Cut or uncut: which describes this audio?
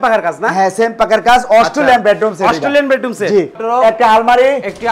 cut